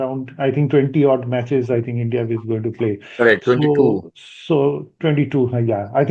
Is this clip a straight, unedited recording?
yes; 0 cuts

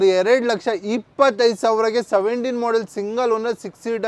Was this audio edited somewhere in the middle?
no; 0 cuts

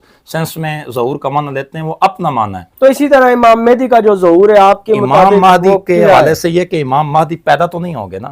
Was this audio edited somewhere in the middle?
no; 0 cuts

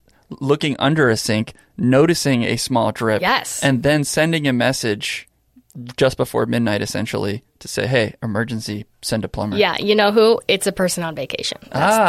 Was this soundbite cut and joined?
no; 0 cuts

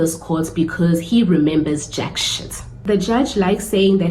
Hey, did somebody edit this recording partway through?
yes; 1 cut; at 2.8 s

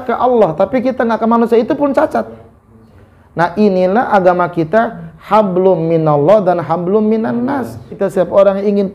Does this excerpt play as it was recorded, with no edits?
no; 1 cut; at 8.0 s

